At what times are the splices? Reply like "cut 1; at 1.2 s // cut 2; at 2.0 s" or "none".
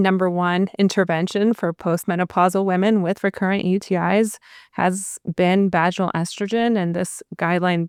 none

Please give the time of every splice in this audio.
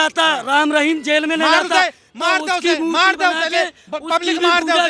none

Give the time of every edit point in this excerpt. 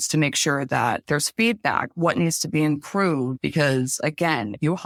none

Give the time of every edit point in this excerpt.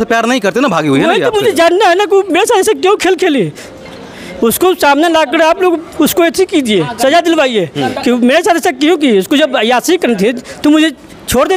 none

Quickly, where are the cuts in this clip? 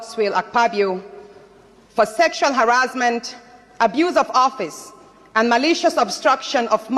none

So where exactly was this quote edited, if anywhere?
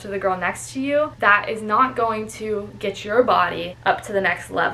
cut 1; at 1.1 s // cut 2; at 3.7 s

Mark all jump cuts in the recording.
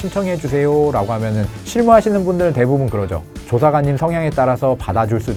none

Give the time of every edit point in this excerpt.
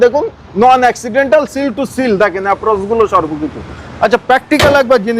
none

